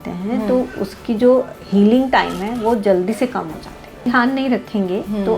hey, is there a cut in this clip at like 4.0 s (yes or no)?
yes